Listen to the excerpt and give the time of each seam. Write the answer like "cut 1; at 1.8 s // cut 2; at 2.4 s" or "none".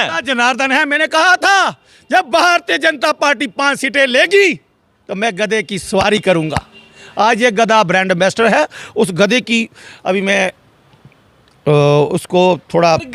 none

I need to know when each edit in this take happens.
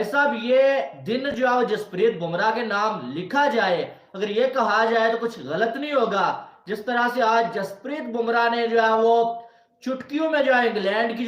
none

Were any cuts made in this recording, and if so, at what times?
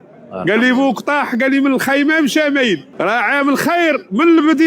cut 1; at 2.9 s

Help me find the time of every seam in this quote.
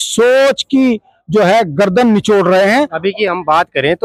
none

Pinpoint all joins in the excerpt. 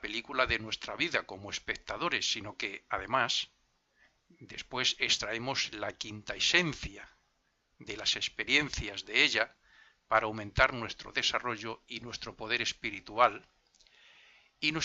none

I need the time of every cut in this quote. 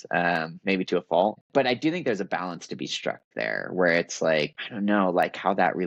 cut 1; at 1.4 s // cut 2; at 4.6 s

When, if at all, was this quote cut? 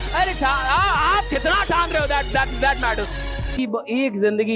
cut 1; at 3.5 s

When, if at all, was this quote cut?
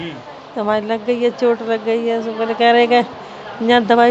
none

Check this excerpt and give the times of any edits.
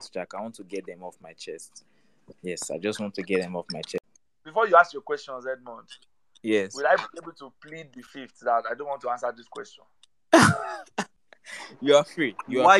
cut 1; at 4.0 s

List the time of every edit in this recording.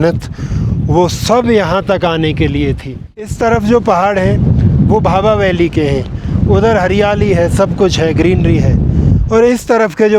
cut 1; at 3.3 s

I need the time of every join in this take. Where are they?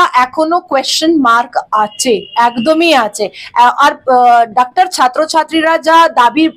none

